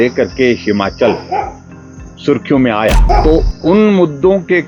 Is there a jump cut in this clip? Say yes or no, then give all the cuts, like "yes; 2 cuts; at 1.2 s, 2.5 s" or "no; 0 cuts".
yes; 1 cut; at 3.0 s